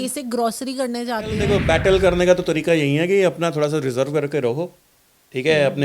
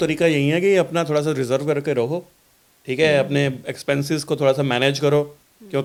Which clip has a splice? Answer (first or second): first